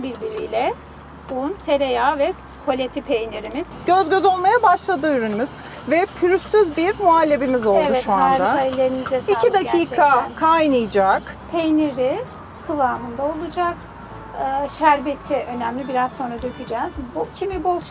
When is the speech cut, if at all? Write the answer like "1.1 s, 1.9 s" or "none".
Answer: 3.6 s, 11.4 s